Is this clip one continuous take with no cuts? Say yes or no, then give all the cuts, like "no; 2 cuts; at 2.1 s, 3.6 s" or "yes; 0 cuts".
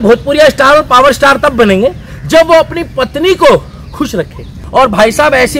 no; 1 cut; at 4.6 s